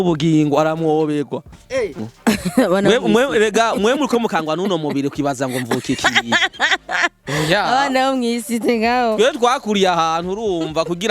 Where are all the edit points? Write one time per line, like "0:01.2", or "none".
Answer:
0:02.0